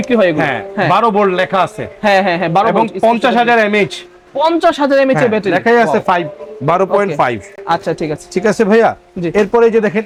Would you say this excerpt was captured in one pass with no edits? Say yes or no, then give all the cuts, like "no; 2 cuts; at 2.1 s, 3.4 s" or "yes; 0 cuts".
yes; 0 cuts